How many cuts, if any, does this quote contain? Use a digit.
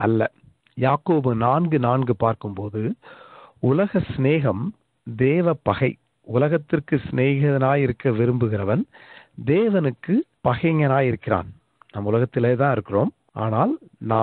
2